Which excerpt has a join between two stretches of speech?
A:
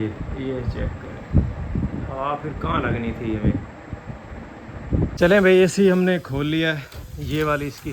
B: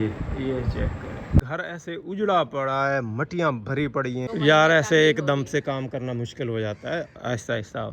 B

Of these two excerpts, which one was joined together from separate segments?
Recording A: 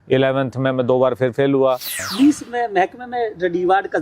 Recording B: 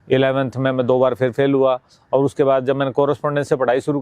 A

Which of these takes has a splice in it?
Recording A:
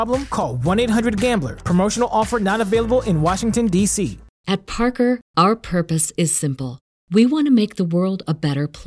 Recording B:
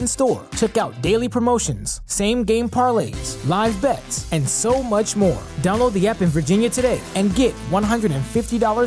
A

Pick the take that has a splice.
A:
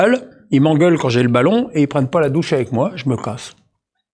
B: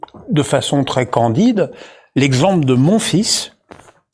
A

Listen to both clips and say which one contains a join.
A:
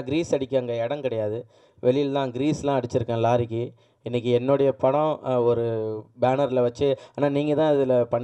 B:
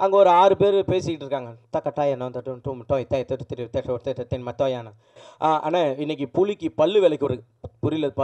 B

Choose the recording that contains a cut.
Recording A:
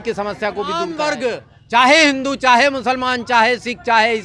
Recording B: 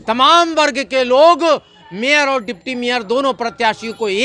A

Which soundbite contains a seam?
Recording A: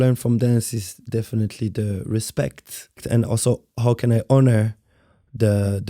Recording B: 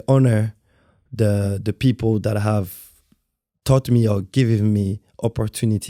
A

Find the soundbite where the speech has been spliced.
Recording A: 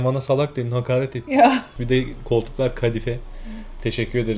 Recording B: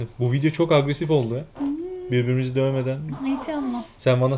A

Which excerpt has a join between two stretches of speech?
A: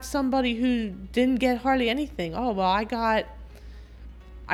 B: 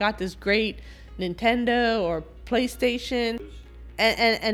B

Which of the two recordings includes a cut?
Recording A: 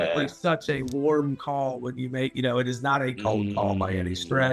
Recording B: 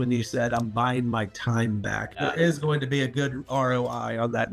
B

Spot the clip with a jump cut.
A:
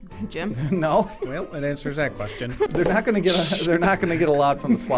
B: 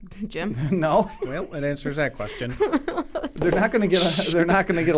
A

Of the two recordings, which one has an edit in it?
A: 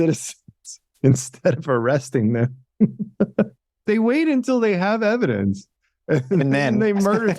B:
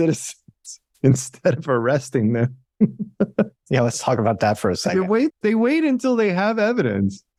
A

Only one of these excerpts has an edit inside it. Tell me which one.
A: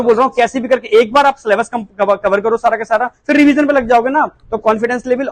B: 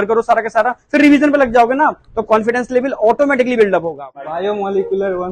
B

